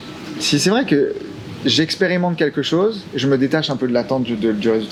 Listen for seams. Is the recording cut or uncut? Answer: uncut